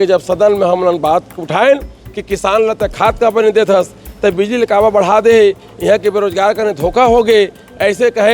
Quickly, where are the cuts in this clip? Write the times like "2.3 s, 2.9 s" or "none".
none

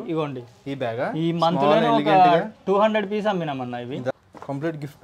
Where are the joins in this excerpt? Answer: 4.1 s

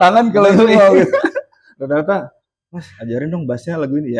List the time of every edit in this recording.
none

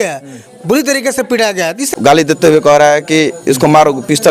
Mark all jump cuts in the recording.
1.9 s

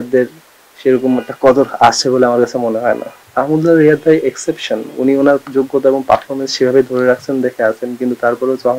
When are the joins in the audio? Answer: 3.2 s

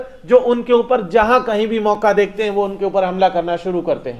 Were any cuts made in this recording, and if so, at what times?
none

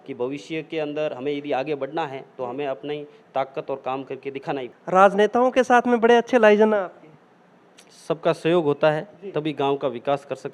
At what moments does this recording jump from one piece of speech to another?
4.7 s

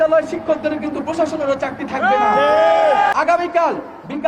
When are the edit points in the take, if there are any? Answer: 3.1 s

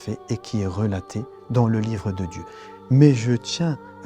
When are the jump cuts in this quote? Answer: 1.4 s

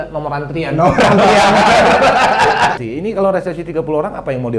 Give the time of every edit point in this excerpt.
2.8 s

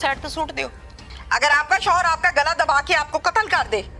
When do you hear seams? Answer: 1.0 s

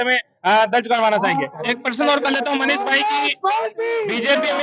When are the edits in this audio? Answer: 1.6 s

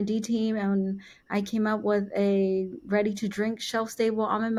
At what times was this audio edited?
none

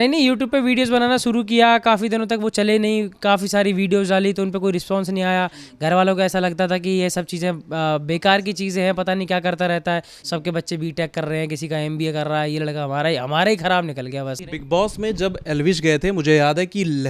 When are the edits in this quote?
10.1 s, 14.5 s

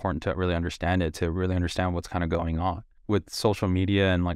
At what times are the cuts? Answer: 2.9 s

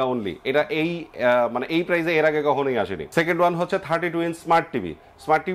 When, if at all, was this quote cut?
3.0 s

